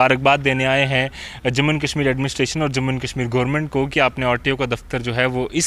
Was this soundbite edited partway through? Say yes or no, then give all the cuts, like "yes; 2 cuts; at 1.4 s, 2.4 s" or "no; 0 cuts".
no; 0 cuts